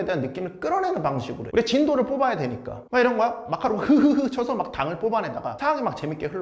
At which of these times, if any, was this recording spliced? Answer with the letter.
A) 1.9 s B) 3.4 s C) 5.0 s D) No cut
D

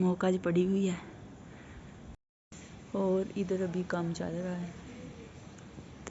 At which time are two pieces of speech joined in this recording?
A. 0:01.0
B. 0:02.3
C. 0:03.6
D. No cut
B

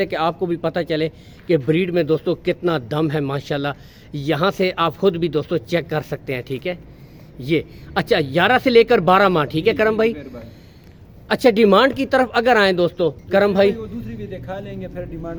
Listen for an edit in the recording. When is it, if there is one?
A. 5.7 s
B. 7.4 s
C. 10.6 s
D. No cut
D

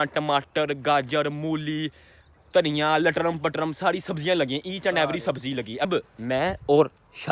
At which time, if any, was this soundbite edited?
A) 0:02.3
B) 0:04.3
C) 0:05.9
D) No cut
C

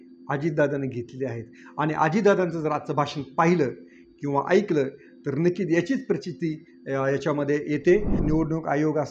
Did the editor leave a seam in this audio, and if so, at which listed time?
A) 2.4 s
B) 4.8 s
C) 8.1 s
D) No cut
C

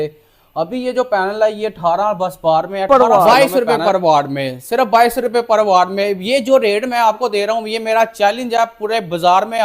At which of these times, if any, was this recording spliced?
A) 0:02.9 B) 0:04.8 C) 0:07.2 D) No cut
A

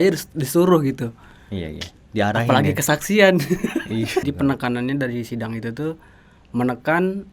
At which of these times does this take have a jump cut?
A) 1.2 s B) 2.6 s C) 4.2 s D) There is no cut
C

